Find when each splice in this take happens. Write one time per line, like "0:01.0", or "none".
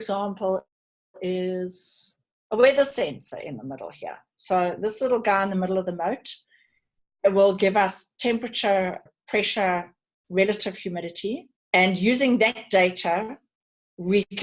0:09.1
0:11.5